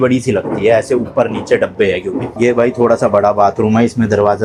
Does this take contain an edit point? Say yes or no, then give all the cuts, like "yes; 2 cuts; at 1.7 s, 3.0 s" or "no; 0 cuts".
no; 0 cuts